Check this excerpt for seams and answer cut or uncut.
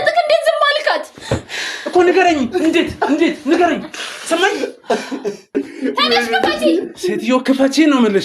cut